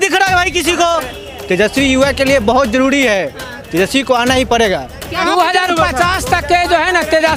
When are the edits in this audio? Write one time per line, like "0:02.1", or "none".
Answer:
0:01.2
0:05.2